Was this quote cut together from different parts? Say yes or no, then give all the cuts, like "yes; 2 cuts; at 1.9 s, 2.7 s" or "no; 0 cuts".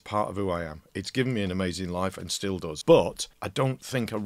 yes; 3 cuts; at 0.8 s, 2.7 s, 3.3 s